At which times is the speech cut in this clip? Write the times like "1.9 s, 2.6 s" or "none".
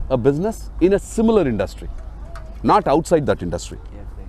none